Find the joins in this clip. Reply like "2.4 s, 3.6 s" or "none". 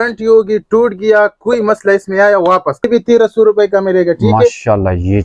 2.9 s